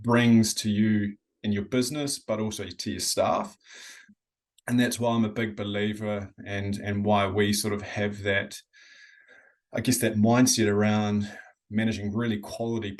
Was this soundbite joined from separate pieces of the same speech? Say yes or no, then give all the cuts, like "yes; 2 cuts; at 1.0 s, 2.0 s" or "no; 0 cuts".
no; 0 cuts